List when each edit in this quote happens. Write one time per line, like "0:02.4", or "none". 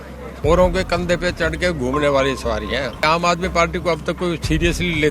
0:03.0

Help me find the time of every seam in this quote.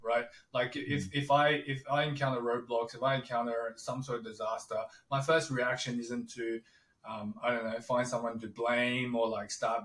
none

